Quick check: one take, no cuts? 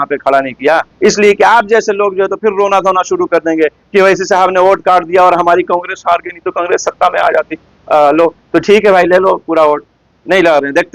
yes; 0 cuts

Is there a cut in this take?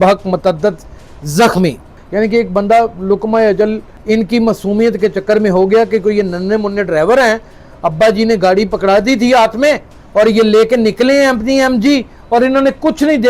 yes; 1 cut; at 1.9 s

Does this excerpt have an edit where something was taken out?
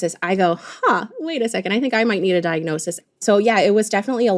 yes; 1 cut; at 2.9 s

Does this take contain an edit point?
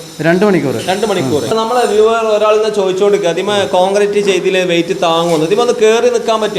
yes; 1 cut; at 1.5 s

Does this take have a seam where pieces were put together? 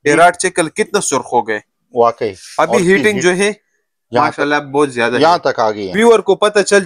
yes; 1 cut; at 5.8 s

